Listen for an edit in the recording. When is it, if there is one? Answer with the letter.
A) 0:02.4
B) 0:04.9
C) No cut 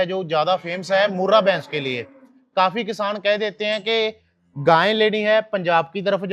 C